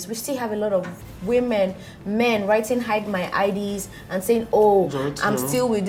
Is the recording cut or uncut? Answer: uncut